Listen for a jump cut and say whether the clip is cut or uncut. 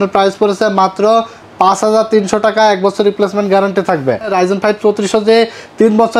cut